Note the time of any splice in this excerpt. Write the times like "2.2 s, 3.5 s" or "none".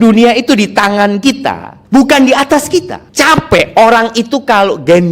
1.7 s, 3.0 s